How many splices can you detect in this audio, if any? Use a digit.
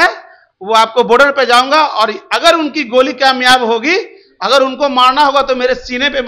0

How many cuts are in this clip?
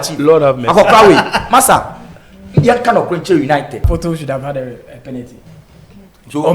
1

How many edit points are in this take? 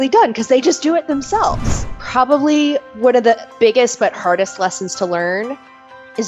2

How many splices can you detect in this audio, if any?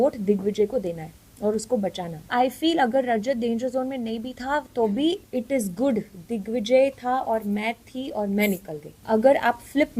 3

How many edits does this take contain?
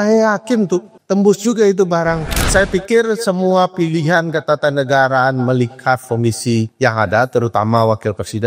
3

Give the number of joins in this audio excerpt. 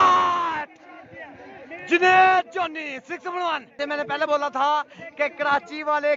1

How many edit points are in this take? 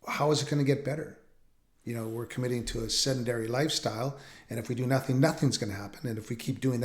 0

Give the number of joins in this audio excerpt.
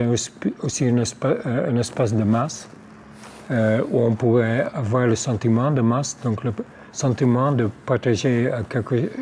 0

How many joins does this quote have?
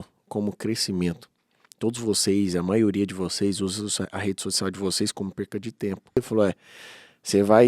1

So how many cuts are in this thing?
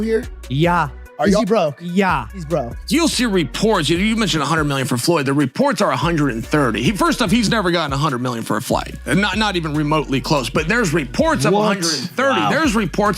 1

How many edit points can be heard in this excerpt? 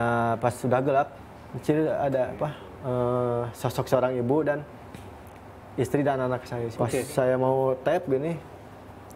2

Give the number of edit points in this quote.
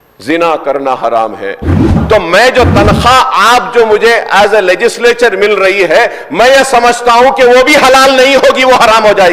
1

